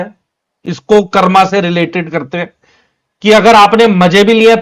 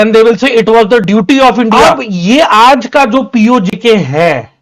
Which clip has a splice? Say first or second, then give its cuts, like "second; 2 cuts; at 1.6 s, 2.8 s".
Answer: second; 1 cut; at 1.9 s